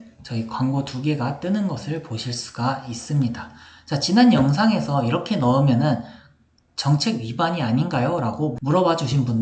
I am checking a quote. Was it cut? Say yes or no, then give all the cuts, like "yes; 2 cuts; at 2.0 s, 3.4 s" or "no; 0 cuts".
no; 0 cuts